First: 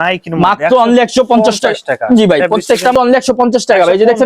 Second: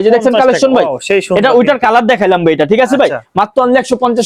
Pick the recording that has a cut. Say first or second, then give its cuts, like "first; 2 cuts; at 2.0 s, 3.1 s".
first; 1 cut; at 2.9 s